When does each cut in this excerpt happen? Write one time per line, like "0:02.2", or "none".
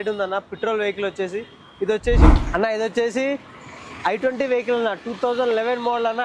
0:02.3